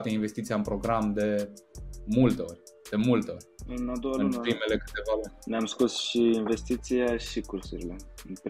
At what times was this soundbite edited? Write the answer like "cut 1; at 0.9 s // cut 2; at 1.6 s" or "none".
cut 1; at 5.4 s